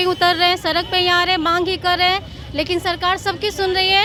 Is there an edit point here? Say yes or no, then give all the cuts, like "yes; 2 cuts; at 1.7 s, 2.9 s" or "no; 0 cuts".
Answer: no; 0 cuts